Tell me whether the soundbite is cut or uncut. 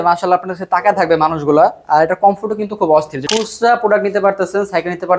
cut